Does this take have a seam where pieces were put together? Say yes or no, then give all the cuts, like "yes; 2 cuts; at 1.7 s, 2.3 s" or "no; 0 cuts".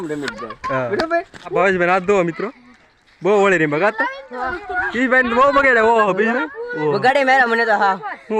yes; 2 cuts; at 1.5 s, 4.7 s